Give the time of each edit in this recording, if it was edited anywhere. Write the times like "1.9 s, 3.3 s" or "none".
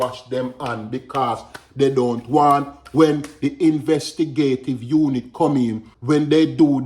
5.9 s